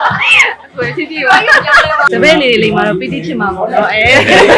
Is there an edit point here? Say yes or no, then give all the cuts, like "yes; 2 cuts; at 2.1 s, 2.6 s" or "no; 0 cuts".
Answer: yes; 1 cut; at 2.1 s